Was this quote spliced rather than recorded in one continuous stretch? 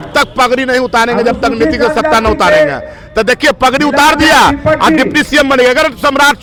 no; 0 cuts

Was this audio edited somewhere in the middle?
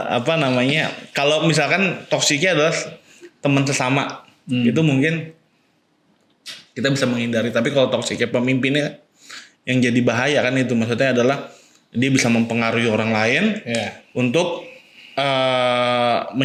no; 0 cuts

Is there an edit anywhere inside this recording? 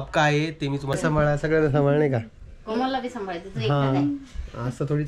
yes; 1 cut; at 1.0 s

